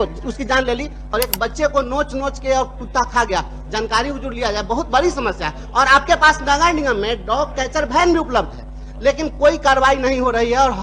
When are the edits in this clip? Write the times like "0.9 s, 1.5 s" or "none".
1.1 s